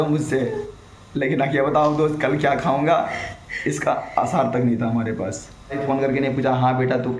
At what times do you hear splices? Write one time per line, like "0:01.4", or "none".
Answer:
0:05.8